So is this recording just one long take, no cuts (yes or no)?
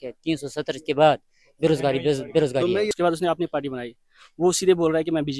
no